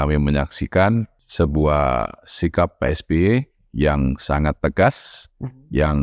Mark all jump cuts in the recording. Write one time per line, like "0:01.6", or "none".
0:01.2